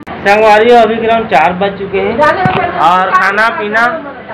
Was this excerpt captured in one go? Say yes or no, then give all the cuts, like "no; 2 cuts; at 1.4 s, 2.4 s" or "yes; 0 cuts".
yes; 0 cuts